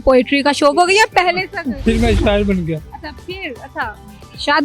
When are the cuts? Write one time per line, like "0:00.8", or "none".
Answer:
0:01.6